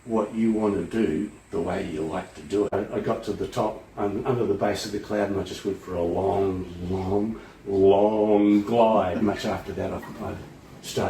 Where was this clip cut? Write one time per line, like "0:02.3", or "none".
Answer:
0:02.7
0:09.2